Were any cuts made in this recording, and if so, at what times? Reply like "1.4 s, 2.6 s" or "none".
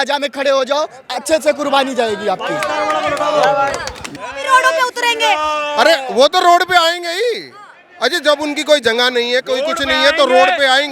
4.1 s